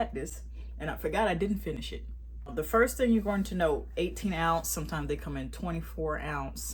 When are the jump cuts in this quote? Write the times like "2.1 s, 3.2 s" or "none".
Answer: none